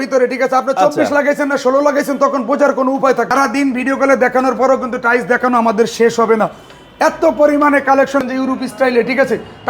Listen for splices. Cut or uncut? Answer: cut